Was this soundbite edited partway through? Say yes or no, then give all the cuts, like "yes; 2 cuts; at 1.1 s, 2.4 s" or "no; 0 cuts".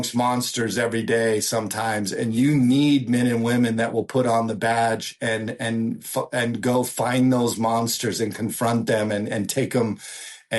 no; 0 cuts